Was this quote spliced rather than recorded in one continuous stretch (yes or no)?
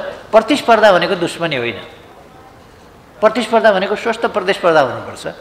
no